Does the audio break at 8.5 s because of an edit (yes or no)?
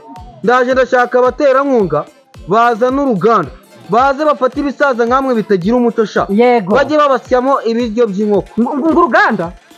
yes